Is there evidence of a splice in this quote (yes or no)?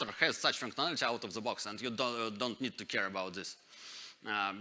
no